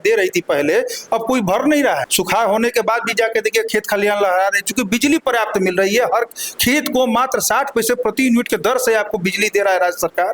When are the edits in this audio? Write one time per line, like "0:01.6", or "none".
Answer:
0:02.1